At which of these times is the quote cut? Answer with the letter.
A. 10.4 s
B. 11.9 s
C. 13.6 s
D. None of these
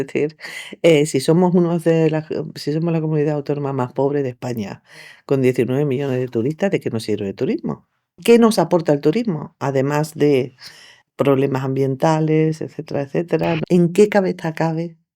C